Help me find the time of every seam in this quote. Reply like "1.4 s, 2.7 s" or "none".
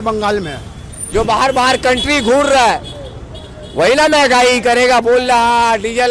0.9 s

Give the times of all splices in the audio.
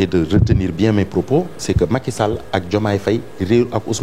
none

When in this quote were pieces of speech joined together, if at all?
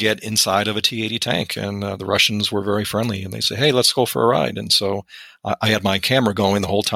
none

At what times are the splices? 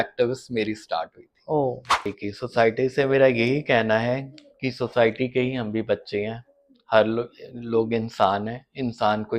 1.9 s

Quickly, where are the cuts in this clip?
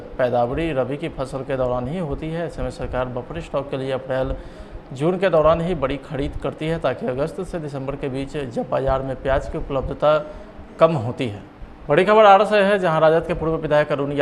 11.8 s

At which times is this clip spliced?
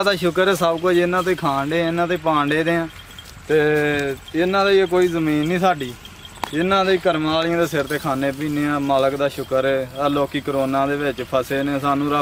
none

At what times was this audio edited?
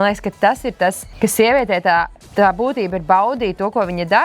1.1 s, 2.2 s

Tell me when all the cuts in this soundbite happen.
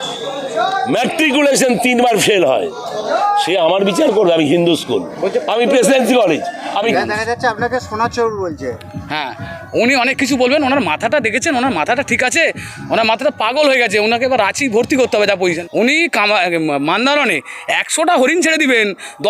6.9 s, 15.6 s

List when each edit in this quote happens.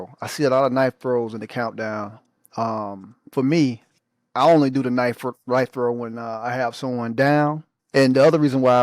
7.7 s

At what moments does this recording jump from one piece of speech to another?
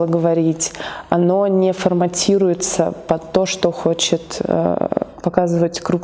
none

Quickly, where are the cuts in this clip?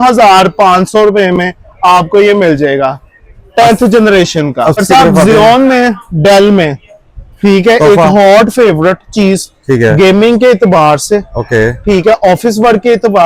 4.8 s

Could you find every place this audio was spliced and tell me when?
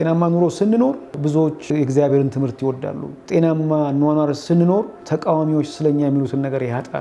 1.5 s, 3.1 s, 4.7 s

